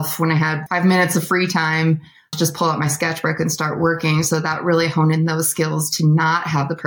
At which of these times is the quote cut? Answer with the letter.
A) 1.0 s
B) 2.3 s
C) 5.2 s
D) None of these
B